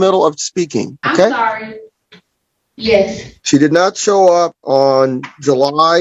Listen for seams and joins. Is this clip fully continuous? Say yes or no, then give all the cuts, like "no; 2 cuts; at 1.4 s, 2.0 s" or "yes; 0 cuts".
yes; 0 cuts